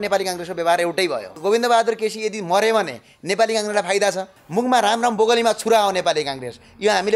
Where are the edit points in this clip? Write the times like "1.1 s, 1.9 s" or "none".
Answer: 1.3 s, 4.4 s